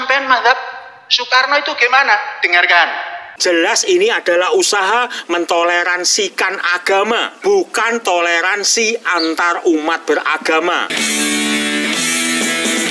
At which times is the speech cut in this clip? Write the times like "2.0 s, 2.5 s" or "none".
3.3 s, 10.9 s

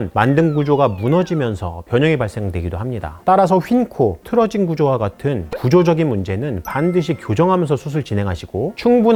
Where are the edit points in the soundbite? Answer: none

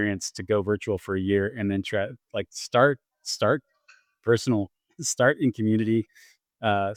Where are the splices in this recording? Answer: none

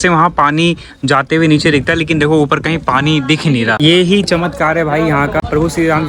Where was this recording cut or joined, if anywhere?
3.8 s, 5.4 s

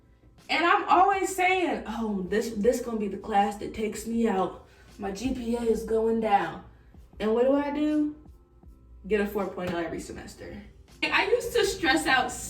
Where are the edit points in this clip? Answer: 11.1 s

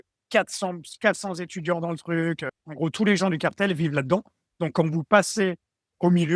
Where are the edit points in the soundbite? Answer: 2.6 s

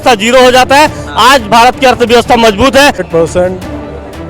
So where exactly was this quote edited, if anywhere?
3.1 s

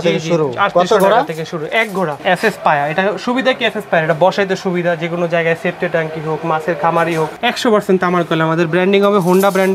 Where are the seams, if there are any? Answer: 2.2 s, 7.4 s

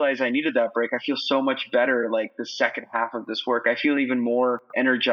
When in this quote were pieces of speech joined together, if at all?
none

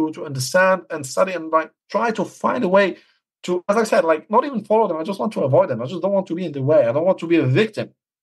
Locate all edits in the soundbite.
none

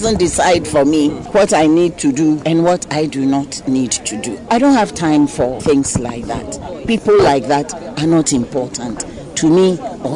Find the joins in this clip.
1.2 s, 2.4 s, 4.5 s, 5.6 s

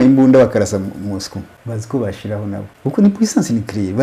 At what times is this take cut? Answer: 1.5 s, 2.7 s

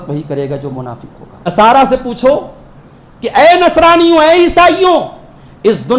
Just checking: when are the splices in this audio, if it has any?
1.5 s

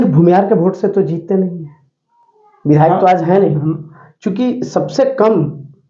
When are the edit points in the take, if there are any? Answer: none

